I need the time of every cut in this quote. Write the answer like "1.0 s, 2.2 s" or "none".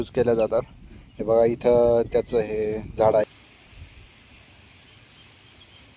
3.2 s